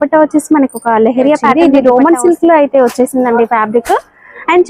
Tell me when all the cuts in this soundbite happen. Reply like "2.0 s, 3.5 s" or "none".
1.5 s